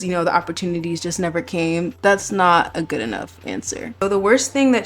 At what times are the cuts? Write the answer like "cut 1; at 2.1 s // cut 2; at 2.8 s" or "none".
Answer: cut 1; at 1.9 s // cut 2; at 4.0 s